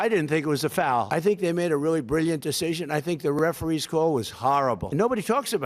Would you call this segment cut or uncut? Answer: cut